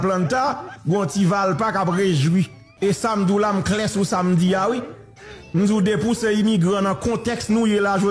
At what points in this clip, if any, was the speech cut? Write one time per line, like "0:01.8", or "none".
0:02.6